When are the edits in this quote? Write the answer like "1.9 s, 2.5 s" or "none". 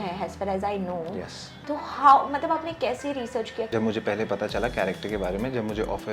3.7 s